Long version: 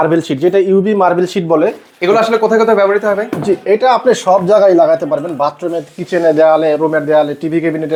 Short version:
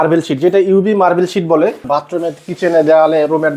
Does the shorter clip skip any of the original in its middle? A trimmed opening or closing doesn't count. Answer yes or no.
yes